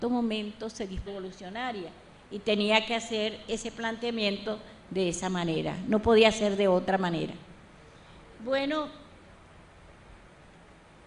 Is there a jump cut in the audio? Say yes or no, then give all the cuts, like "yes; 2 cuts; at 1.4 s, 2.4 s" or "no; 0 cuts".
no; 0 cuts